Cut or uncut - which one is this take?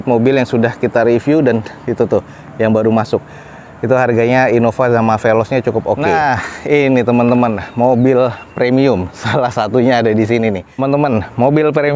cut